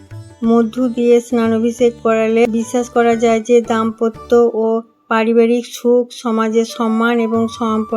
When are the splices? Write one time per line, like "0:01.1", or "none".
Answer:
0:02.5